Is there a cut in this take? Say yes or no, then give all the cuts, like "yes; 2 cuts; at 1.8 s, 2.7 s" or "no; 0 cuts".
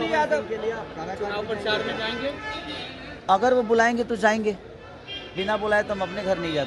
no; 0 cuts